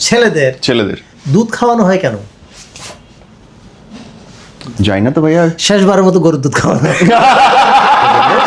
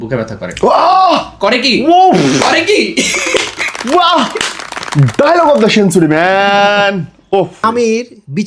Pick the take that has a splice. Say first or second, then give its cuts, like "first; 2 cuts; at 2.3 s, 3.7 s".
second; 1 cut; at 7.6 s